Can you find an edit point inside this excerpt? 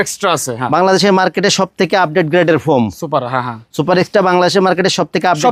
no; 0 cuts

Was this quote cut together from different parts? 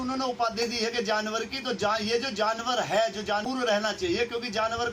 yes; 1 cut; at 3.4 s

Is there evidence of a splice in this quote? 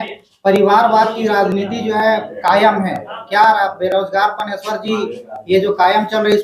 no; 0 cuts

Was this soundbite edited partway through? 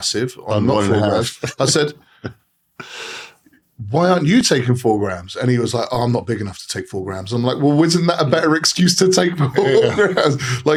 no; 0 cuts

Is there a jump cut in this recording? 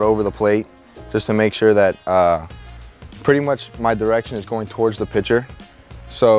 no; 0 cuts

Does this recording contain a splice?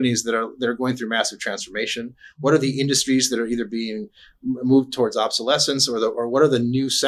no; 0 cuts

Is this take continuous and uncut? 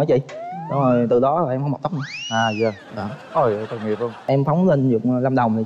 no; 1 cut; at 4.2 s

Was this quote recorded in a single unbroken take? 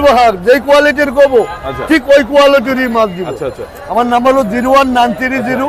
yes; 0 cuts

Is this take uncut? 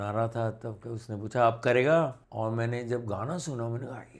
no; 1 cut; at 2.2 s

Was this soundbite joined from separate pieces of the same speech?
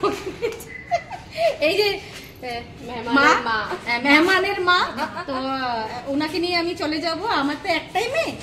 no; 0 cuts

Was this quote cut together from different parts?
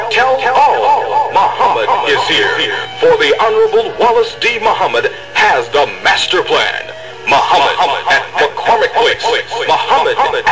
no; 0 cuts

